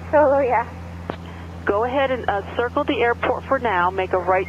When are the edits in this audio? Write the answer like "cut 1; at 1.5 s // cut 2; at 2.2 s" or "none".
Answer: cut 1; at 1.1 s